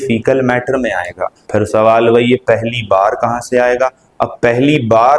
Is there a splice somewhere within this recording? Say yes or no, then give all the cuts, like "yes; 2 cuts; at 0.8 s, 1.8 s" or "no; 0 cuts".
yes; 1 cut; at 1.3 s